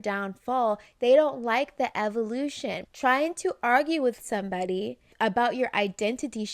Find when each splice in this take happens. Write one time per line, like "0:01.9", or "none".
0:02.9
0:05.1